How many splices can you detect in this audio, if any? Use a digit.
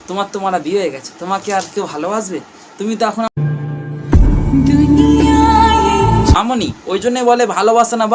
2